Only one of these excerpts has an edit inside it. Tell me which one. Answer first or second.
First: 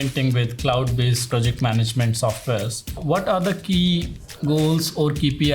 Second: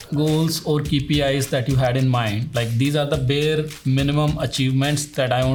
first